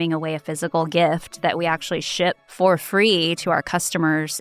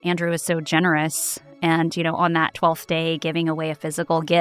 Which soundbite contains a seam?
first; 1 cut; at 2.5 s

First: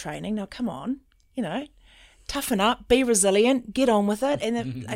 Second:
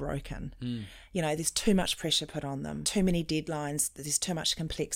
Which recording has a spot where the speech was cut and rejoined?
second; 1 cut; at 2.8 s

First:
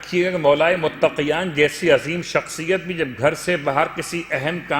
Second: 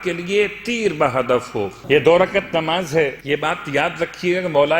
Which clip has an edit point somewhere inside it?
second; 2 cuts; at 1.8 s, 3.2 s

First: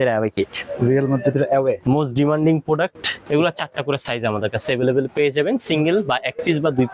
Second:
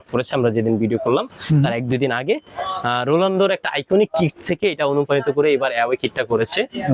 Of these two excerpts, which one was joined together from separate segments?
first; 1 cut; at 3.1 s

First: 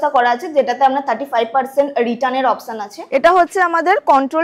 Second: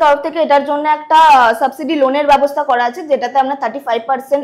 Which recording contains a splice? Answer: first; 1 cut; at 3.0 s

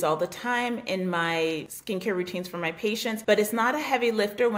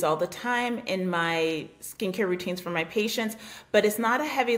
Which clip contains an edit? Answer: first; 2 cuts; at 1.7 s, 3.2 s

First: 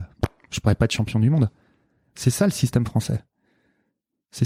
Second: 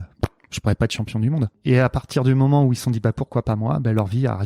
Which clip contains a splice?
second; 1 cut; at 1.6 s

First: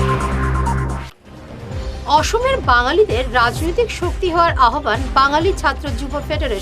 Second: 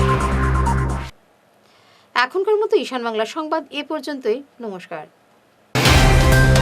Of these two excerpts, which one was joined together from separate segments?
first; 1 cut; at 1.0 s

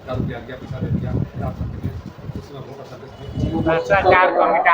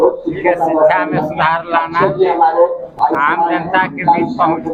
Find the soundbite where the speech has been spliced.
first; 1 cut; at 3.6 s

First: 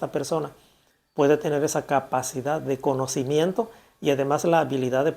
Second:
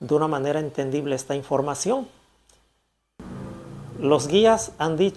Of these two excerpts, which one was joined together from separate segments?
second; 1 cut; at 3.2 s

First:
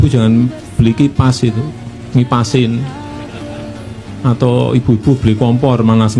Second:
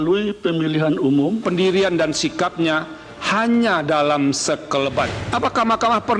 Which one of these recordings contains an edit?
second; 1 cut; at 1.4 s

